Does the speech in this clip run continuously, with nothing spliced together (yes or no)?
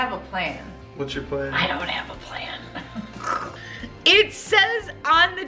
no